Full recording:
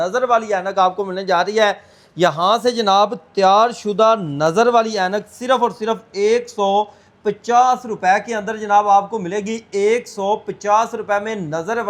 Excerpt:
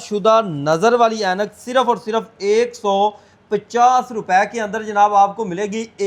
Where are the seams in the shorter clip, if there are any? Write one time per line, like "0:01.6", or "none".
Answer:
none